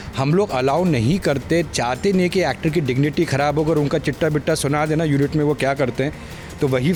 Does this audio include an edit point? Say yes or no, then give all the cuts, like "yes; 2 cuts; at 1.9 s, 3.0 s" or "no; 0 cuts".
no; 0 cuts